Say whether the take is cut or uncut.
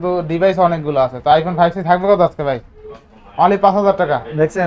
uncut